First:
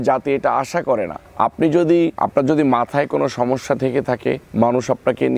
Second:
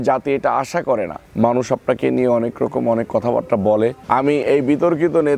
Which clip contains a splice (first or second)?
second